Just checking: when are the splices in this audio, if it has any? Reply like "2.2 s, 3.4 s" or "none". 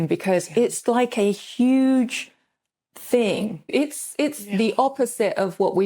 3.7 s